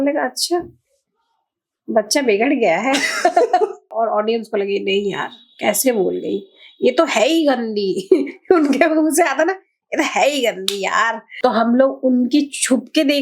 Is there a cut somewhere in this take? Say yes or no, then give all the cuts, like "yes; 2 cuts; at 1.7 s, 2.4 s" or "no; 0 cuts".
yes; 2 cuts; at 3.8 s, 11.2 s